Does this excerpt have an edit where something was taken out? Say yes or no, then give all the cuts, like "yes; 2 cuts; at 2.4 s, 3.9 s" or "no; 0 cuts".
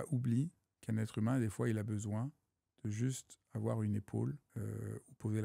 yes; 1 cut; at 4.5 s